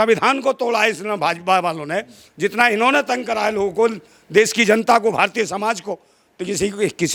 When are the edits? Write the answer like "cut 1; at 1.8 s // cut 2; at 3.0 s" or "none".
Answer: none